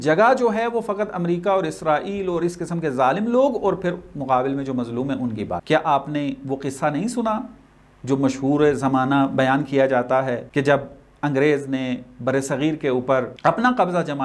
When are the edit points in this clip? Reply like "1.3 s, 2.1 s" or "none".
5.6 s, 10.4 s, 13.3 s